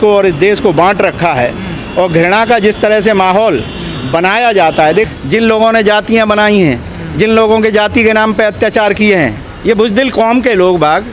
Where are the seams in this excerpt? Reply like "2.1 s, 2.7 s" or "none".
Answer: 5.1 s, 9.5 s